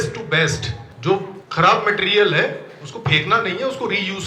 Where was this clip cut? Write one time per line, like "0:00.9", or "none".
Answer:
0:01.1